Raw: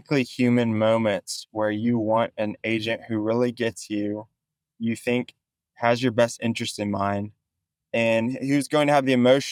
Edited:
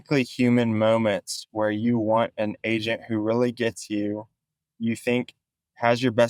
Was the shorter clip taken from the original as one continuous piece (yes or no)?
yes